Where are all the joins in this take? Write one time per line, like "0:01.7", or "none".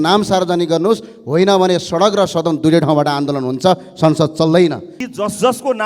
0:04.9